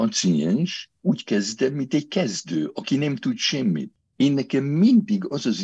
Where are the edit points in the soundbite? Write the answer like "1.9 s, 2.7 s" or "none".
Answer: 0.9 s, 4.0 s